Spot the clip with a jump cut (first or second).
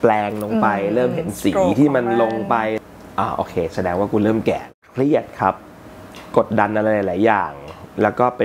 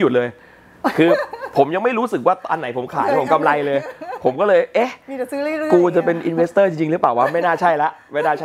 first